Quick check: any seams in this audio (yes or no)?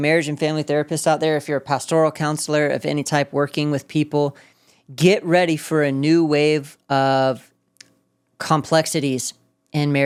no